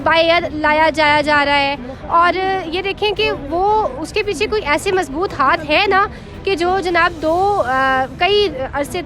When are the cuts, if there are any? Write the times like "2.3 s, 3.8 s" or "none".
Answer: none